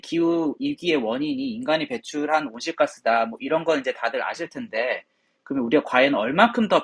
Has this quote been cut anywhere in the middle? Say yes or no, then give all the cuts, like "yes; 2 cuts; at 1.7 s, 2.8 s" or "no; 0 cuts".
no; 0 cuts